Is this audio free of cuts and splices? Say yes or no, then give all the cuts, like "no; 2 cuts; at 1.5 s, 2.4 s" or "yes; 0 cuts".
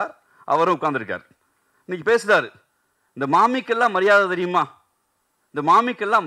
yes; 0 cuts